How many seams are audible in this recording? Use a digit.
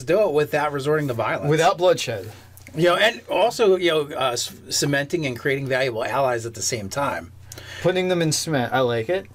1